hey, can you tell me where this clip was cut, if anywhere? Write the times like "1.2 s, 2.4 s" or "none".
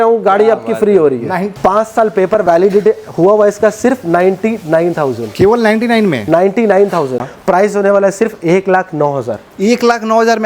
1.5 s, 7.3 s